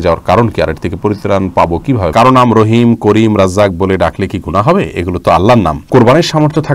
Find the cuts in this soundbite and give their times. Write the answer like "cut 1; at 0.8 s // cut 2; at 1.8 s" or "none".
cut 1; at 2.1 s // cut 2; at 5.8 s